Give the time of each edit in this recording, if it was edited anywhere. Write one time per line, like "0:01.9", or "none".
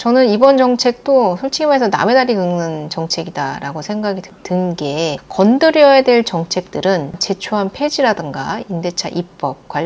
0:07.2